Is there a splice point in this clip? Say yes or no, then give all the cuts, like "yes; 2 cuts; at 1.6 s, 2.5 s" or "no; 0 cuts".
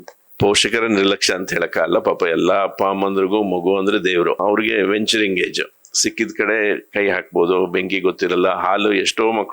yes; 1 cut; at 4.4 s